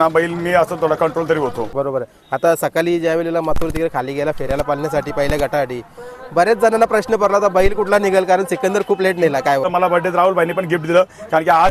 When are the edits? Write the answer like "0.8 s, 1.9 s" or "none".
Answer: 1.7 s, 9.7 s